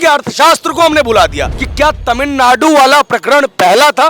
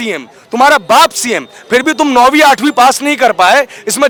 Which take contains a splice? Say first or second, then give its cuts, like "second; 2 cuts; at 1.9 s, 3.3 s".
first; 1 cut; at 1.5 s